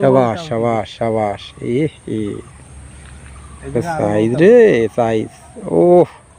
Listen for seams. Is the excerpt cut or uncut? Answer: uncut